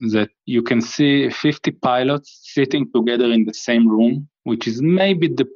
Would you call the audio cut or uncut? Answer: uncut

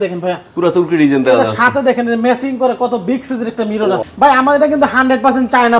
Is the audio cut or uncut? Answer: cut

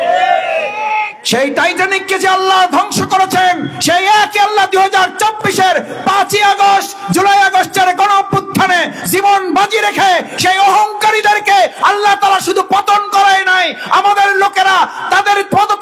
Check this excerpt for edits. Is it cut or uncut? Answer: uncut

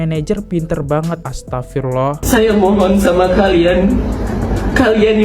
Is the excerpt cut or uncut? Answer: cut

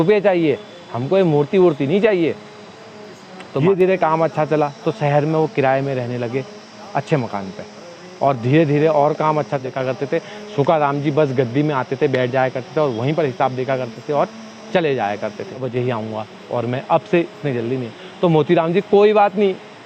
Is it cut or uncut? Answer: cut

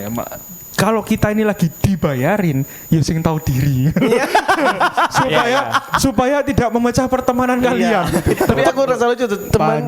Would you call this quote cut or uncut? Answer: cut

